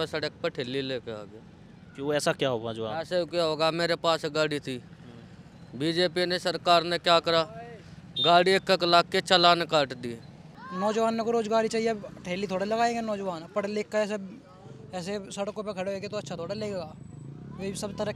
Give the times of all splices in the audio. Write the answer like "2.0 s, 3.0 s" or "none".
10.5 s